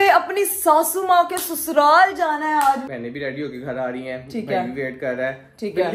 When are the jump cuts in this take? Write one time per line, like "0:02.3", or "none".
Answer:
none